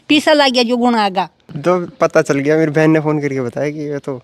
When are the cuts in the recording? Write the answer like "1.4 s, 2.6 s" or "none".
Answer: 1.4 s